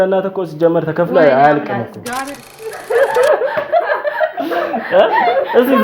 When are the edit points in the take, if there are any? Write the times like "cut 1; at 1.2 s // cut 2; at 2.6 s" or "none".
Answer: cut 1; at 2.8 s